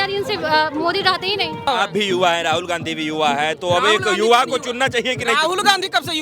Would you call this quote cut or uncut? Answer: cut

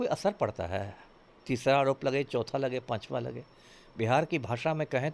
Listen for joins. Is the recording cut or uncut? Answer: uncut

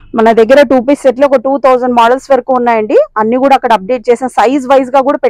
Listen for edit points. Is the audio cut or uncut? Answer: uncut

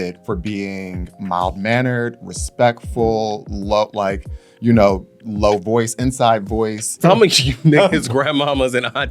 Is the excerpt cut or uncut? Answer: cut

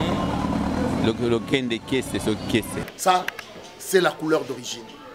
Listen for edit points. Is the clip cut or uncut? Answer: cut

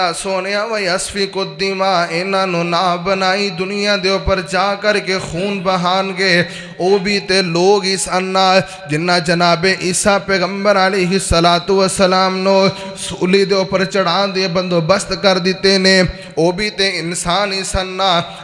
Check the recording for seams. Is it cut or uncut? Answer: uncut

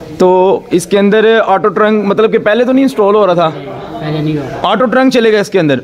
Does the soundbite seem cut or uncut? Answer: uncut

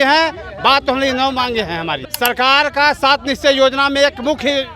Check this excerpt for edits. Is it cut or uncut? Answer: cut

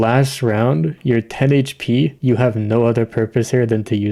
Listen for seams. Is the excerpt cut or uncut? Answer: cut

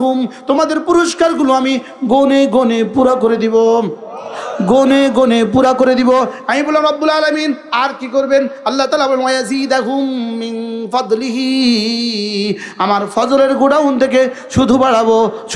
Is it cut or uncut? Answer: uncut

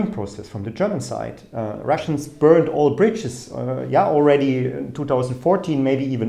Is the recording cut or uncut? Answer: uncut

